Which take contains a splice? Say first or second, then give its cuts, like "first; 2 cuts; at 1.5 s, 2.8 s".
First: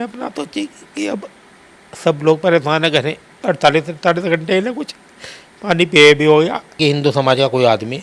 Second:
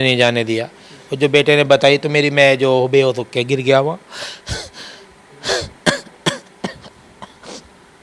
first; 1 cut; at 6.8 s